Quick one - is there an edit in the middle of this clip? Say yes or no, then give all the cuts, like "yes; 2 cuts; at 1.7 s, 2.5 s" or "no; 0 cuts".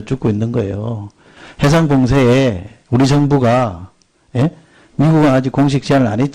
no; 0 cuts